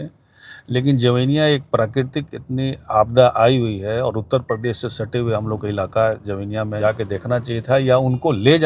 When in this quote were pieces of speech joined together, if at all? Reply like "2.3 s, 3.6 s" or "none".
6.8 s

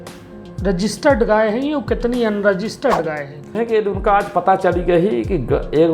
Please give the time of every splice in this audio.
3.6 s

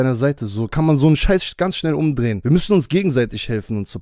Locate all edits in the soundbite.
2.4 s

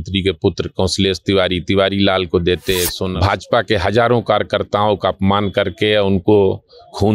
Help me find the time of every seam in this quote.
2.9 s

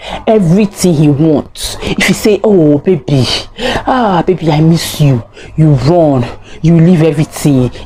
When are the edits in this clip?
none

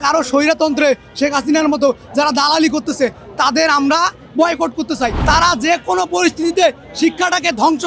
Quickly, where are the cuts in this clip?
5.2 s

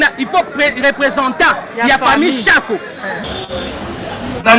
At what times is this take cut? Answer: 3.2 s

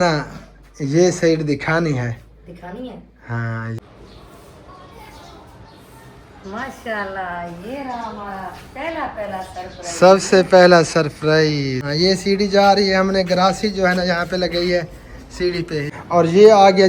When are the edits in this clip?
3.8 s, 11.8 s, 15.9 s

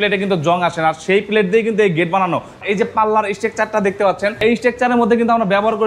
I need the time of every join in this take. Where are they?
2.6 s, 4.4 s

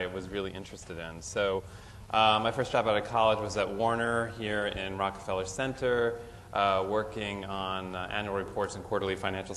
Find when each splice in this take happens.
1.1 s

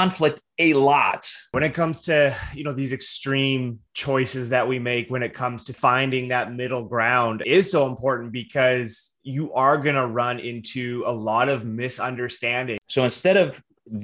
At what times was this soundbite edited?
1.5 s, 5.7 s, 7.4 s, 12.8 s

